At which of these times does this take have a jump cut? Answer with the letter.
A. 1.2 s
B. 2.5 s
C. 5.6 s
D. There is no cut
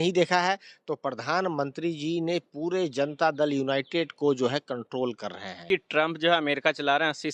C